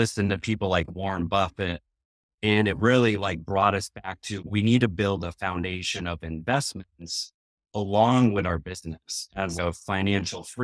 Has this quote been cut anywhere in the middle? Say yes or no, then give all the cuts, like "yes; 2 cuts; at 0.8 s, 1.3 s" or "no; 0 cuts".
yes; 2 cuts; at 4.3 s, 9.6 s